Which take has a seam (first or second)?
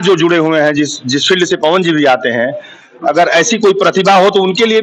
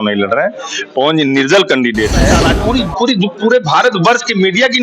second